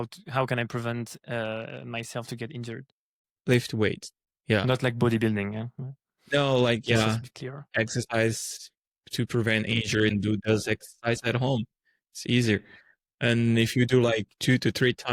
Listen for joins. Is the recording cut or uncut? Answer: uncut